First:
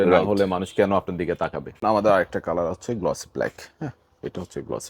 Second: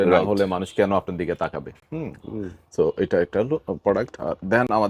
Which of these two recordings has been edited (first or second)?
first